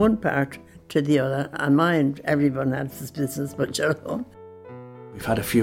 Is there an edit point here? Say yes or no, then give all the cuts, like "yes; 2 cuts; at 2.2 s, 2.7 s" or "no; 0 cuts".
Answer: yes; 1 cut; at 4.6 s